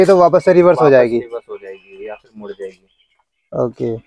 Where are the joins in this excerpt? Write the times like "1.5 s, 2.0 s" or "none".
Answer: none